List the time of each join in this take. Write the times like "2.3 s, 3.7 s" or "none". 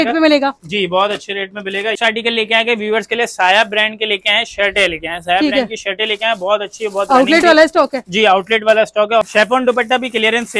2.0 s, 9.3 s